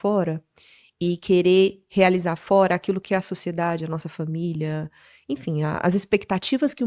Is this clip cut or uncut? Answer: uncut